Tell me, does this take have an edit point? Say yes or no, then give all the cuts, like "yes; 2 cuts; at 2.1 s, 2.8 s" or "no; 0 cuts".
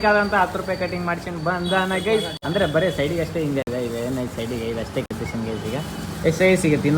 no; 0 cuts